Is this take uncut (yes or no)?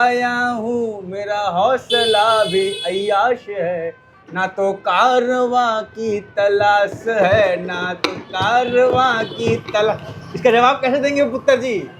yes